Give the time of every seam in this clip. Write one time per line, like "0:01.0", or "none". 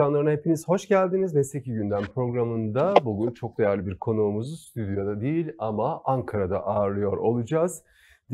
none